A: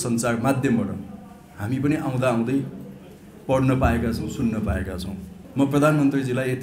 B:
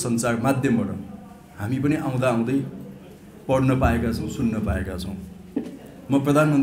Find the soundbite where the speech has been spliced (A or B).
A